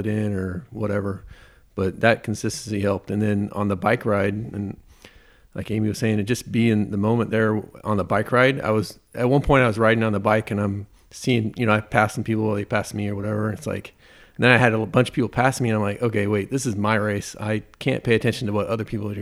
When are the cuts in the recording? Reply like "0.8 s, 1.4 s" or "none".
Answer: none